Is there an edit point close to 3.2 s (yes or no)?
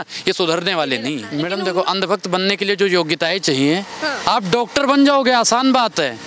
no